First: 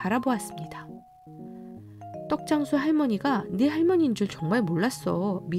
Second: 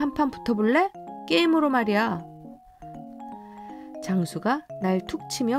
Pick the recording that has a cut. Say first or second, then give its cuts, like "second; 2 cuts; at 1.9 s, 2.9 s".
second; 2 cuts; at 2.2 s, 4.1 s